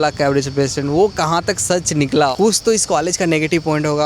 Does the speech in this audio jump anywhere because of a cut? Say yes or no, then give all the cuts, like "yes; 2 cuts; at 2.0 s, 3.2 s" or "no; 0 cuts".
yes; 1 cut; at 2.3 s